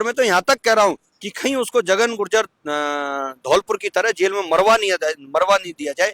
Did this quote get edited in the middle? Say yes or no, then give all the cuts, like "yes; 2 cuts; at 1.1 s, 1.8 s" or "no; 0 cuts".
no; 0 cuts